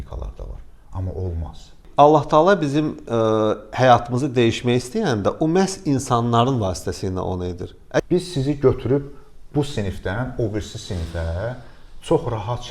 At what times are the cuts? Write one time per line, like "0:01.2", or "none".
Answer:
0:01.8
0:08.0